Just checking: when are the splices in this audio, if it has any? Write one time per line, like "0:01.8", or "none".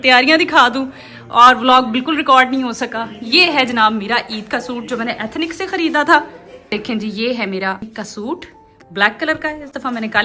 none